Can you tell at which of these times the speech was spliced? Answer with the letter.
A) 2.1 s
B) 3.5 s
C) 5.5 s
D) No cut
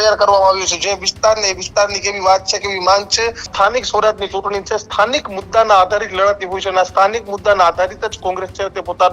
B